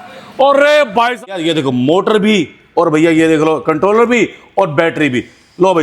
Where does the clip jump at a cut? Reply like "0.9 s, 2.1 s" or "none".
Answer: 1.3 s